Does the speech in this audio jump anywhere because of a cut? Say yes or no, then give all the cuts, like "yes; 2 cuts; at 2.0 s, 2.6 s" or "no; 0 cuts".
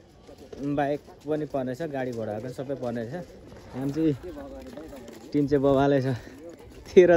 no; 0 cuts